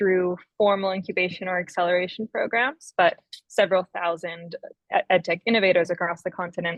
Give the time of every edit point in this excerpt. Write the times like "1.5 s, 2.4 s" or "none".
none